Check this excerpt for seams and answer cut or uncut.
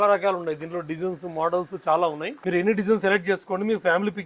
cut